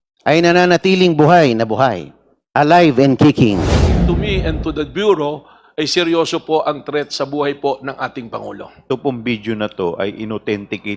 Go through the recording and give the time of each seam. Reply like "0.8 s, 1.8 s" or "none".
4.0 s, 8.8 s